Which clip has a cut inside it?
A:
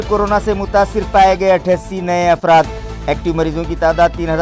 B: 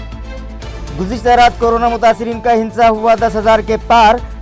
B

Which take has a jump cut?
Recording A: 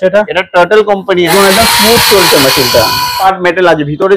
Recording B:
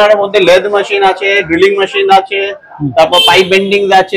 A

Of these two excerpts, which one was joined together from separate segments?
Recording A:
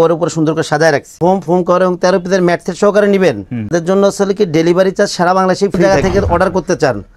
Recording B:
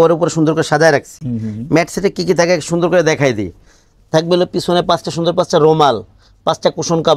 A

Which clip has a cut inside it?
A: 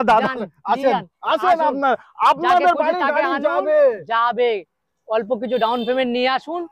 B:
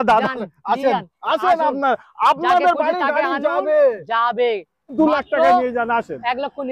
B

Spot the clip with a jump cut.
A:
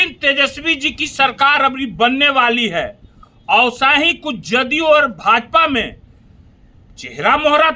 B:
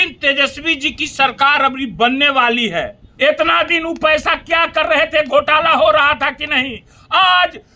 B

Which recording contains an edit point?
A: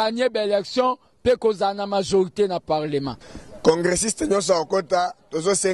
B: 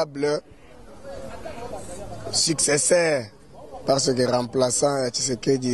A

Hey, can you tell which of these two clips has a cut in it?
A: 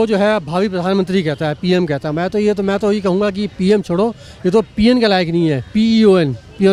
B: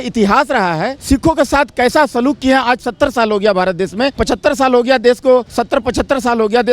B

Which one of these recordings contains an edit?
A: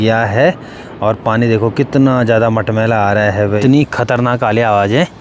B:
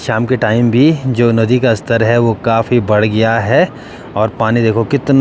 A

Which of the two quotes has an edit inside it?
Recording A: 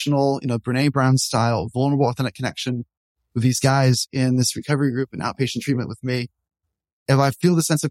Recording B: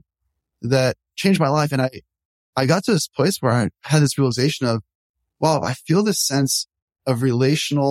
B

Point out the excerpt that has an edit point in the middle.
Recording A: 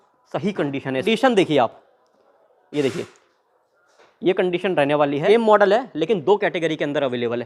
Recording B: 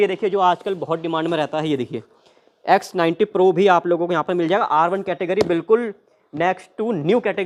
A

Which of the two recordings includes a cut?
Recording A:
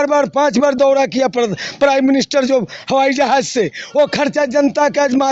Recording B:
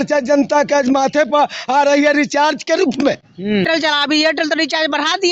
B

